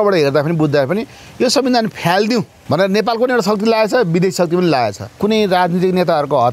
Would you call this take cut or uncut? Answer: cut